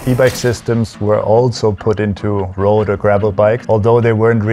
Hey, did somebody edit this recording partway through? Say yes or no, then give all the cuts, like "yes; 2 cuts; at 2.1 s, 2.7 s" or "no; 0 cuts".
yes; 1 cut; at 3.6 s